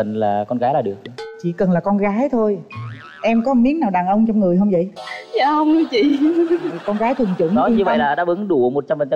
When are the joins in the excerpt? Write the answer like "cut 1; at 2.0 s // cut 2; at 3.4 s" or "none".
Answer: none

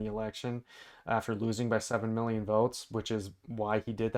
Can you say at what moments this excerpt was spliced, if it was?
none

